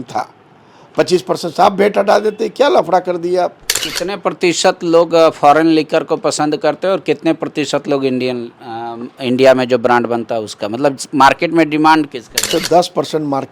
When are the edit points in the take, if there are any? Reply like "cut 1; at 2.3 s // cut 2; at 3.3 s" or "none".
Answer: cut 1; at 3.9 s // cut 2; at 12.5 s